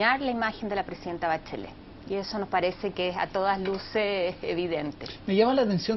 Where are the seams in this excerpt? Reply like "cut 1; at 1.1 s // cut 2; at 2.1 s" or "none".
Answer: cut 1; at 4.8 s